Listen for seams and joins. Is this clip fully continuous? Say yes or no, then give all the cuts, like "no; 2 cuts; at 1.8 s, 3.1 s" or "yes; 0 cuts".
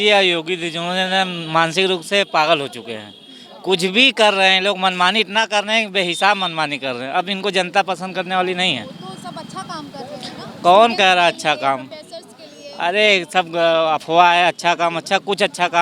yes; 0 cuts